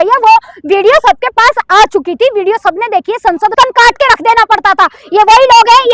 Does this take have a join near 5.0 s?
no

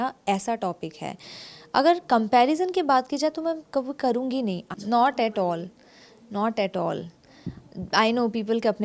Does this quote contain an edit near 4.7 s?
yes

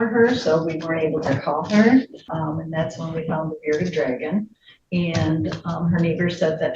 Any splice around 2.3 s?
yes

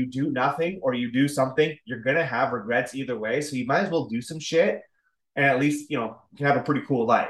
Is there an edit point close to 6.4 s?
no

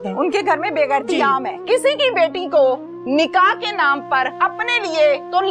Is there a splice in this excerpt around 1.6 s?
yes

